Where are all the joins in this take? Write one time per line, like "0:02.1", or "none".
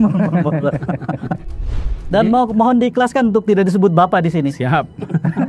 0:01.6